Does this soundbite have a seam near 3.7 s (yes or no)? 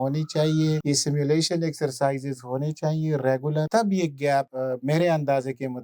yes